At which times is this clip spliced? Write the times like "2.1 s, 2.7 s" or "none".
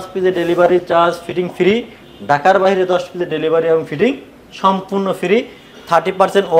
none